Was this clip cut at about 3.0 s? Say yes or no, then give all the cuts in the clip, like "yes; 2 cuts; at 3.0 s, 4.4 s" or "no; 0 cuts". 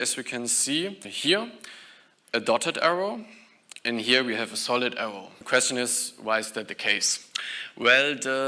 no; 2 cuts; at 1.1 s, 5.3 s